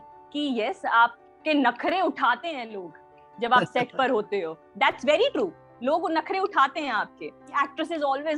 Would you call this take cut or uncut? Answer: cut